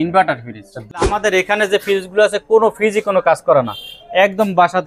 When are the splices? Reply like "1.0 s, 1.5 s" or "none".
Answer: 1.0 s